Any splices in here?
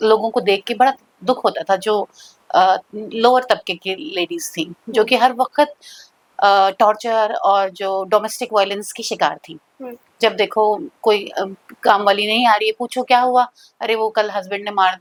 no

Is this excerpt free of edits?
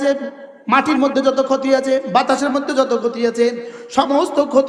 yes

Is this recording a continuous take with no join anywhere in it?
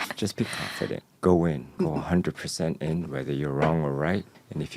no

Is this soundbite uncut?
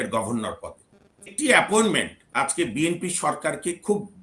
no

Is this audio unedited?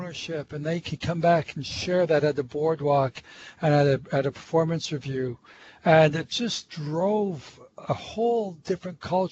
yes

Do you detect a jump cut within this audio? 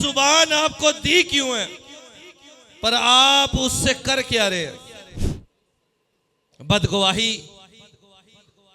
yes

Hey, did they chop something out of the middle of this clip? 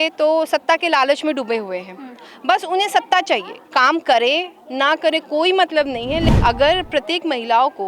yes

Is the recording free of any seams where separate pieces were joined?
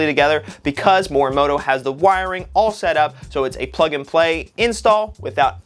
yes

